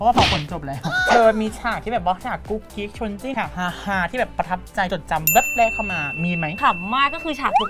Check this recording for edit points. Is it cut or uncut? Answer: cut